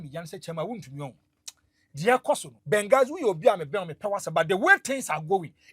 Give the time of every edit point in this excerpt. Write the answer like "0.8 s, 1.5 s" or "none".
2.5 s